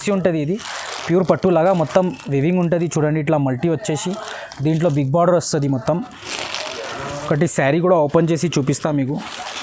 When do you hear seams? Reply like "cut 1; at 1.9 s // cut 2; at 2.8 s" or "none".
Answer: none